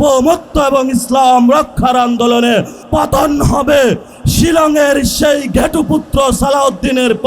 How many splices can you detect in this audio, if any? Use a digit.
2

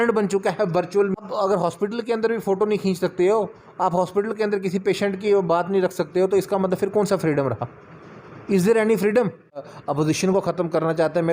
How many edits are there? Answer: 2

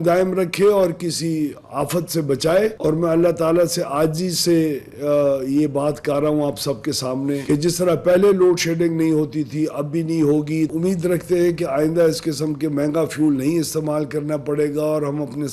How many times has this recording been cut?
1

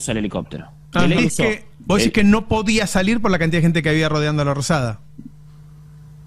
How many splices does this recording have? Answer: 1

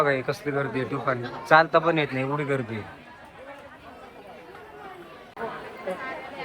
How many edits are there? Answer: 1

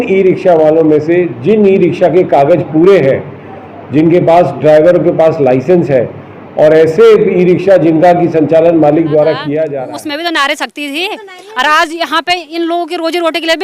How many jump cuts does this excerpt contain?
1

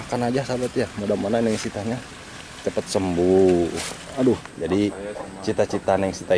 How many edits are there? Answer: 1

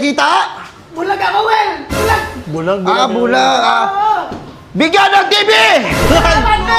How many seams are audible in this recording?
0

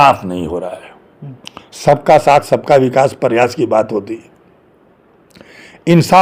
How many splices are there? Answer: 0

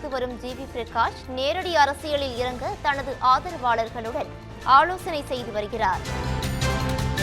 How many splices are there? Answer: 1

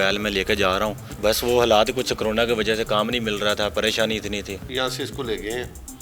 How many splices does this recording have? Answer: 2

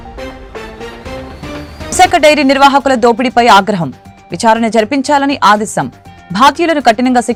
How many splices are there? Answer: 0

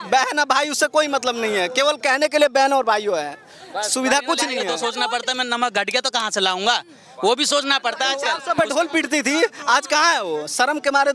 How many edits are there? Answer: 2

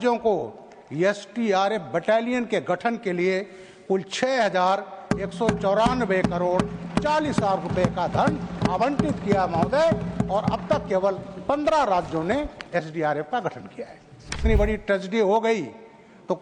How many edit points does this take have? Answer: 1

